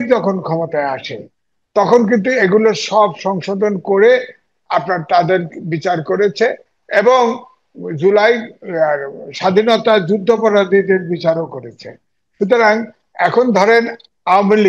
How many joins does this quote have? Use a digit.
0